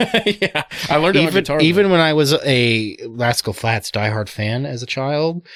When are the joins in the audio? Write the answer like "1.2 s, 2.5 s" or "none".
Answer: none